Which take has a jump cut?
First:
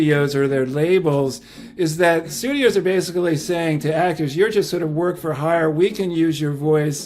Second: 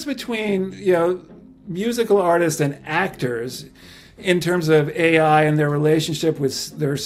first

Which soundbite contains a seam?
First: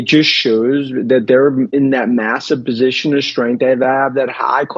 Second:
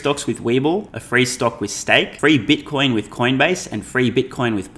second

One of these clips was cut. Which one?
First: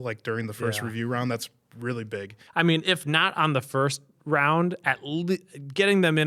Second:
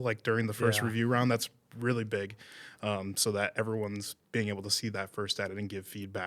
first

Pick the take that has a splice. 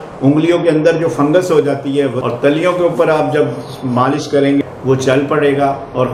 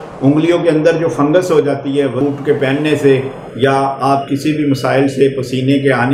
first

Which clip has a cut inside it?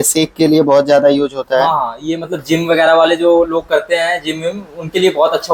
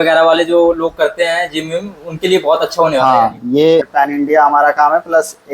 second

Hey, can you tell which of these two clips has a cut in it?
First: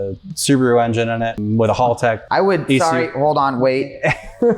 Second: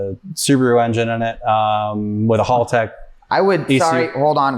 first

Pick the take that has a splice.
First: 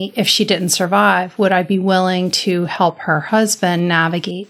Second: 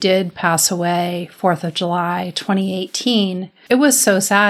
second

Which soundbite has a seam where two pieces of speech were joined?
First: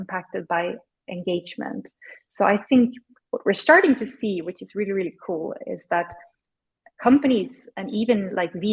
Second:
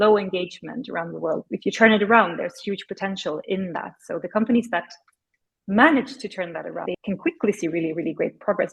second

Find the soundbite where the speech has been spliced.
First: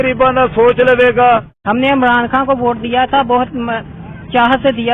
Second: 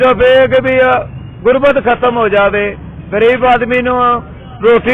first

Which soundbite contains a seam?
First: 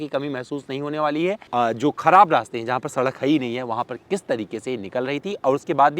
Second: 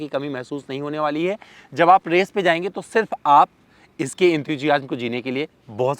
first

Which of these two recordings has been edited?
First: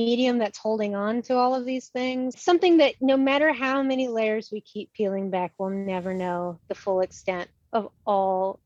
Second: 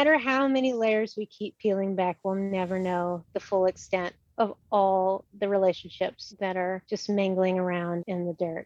first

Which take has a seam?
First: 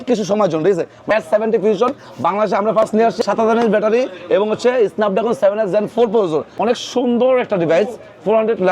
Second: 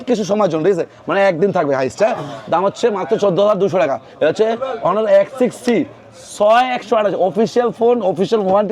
first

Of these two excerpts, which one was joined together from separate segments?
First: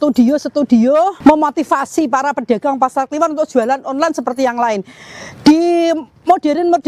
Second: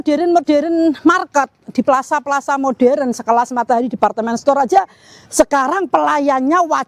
first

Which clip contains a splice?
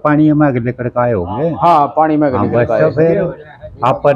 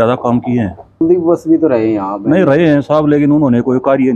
second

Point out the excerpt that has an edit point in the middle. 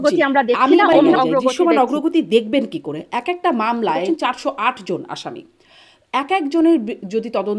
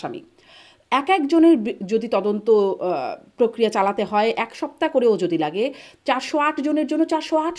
first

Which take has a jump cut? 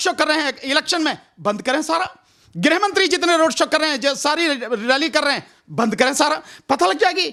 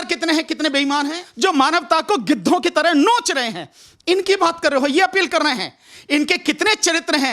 second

